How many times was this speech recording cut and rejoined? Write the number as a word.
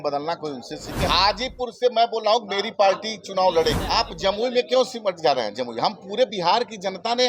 two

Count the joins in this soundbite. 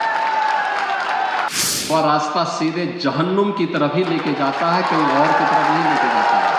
one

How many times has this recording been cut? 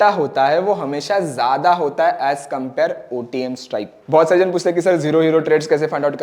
one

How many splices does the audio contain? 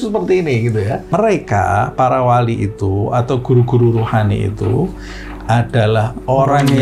one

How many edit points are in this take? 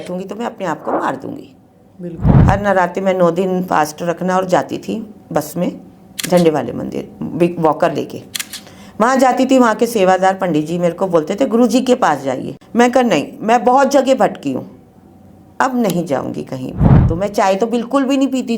three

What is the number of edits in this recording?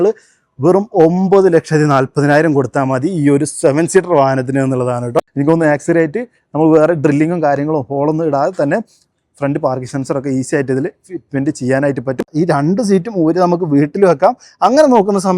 two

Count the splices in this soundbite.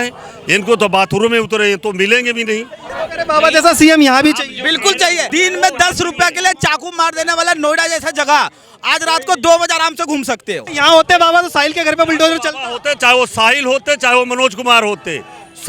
three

